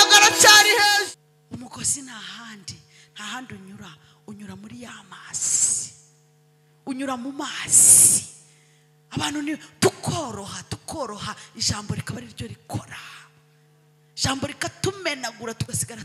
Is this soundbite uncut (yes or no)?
no